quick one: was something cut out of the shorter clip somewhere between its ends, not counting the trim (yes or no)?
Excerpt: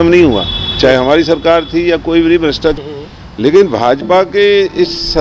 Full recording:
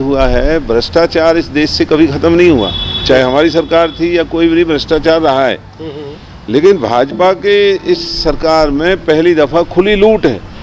yes